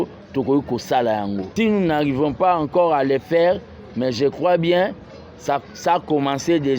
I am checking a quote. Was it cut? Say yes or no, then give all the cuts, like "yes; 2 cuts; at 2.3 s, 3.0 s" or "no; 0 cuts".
yes; 1 cut; at 1.5 s